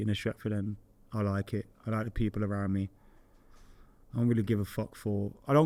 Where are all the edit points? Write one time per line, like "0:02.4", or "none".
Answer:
none